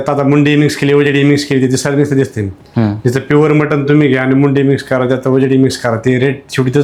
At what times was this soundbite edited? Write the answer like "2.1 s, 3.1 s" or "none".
none

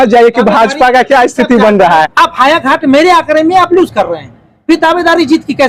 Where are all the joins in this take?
2.0 s

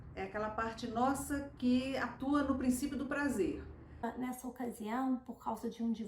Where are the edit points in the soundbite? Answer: 4.0 s

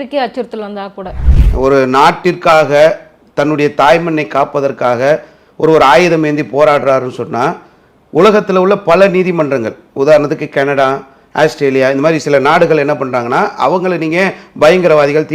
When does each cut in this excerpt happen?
1.2 s

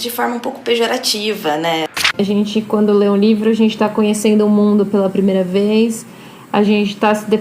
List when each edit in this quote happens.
2.1 s

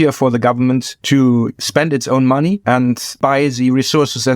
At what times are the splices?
0.9 s, 1.6 s, 2.8 s

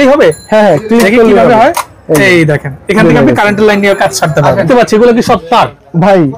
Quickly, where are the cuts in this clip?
4.6 s

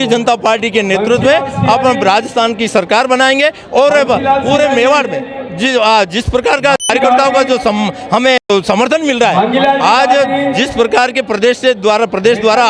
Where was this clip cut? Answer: none

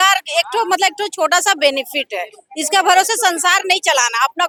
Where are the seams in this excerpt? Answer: none

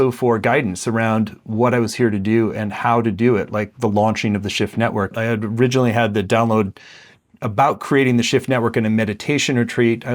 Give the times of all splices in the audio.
5.1 s

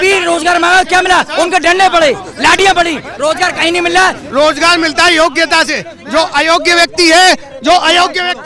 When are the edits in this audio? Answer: 4.2 s

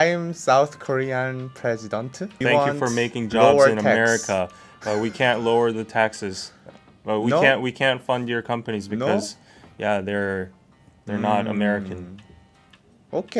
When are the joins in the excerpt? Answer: 2.4 s

